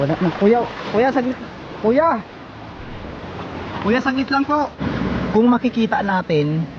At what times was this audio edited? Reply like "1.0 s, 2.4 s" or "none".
4.8 s